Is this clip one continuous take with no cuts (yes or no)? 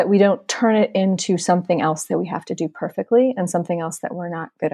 yes